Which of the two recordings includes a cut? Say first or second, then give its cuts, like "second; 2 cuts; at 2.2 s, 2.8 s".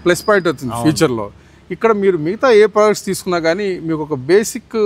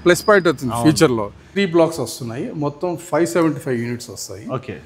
second; 1 cut; at 1.4 s